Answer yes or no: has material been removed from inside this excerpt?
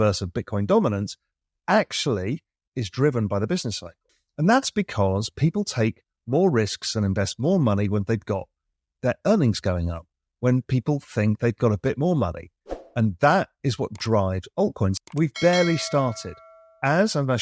yes